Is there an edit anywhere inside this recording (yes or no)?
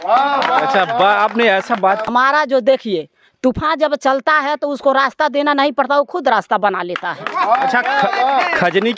yes